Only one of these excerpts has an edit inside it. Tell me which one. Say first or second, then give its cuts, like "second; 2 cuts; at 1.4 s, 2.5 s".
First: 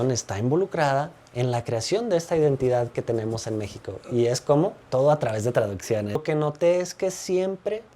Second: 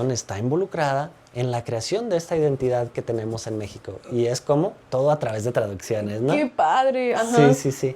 first; 1 cut; at 6.2 s